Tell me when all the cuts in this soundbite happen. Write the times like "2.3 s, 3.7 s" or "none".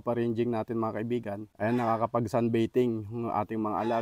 1.4 s